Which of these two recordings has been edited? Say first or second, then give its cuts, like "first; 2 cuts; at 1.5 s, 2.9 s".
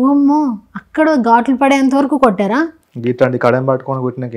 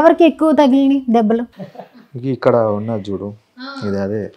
second; 1 cut; at 1.6 s